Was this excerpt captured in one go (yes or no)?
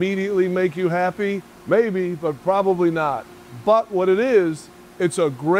no